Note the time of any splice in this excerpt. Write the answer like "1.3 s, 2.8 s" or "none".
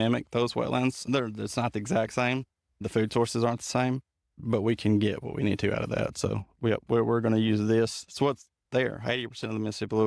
1.0 s, 2.8 s, 4.3 s